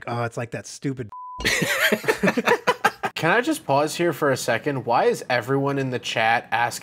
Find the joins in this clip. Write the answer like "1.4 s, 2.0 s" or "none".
1.2 s, 3.1 s